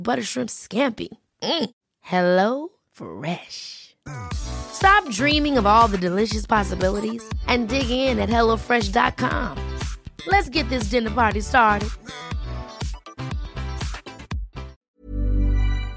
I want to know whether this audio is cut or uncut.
cut